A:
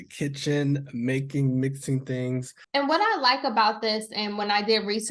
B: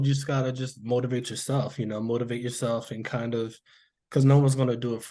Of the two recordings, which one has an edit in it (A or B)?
A